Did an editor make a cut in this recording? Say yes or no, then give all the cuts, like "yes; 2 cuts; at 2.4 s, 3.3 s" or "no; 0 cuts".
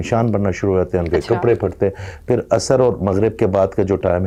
no; 0 cuts